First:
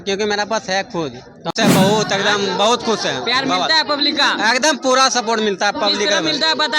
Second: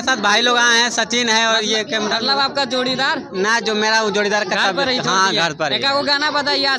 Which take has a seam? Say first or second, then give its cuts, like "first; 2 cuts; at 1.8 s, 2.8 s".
first; 1 cut; at 1.5 s